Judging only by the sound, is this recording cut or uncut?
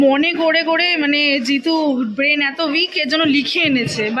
uncut